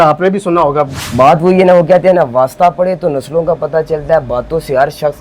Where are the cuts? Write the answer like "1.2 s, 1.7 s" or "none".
1.0 s